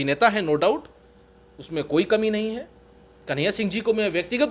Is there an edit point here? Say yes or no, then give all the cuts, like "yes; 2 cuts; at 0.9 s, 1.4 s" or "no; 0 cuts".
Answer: no; 0 cuts